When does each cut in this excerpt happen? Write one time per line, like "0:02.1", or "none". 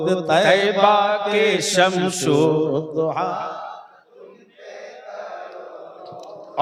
none